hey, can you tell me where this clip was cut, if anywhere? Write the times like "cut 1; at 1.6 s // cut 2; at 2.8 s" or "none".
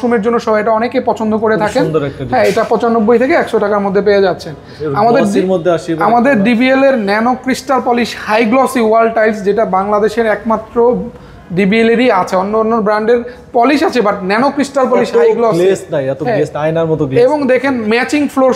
none